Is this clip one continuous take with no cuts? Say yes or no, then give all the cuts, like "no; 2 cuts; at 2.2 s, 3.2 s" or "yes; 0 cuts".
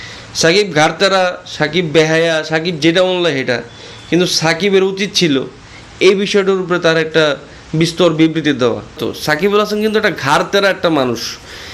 no; 1 cut; at 9.1 s